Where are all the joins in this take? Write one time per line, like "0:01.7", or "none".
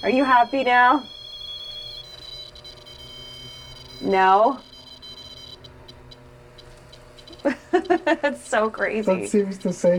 none